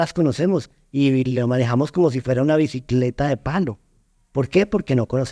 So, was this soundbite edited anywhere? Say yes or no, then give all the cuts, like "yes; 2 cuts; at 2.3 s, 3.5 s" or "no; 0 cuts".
no; 0 cuts